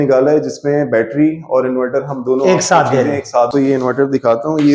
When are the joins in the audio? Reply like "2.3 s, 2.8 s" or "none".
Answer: 3.5 s